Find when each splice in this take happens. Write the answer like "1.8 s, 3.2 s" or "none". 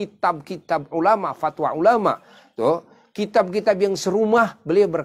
none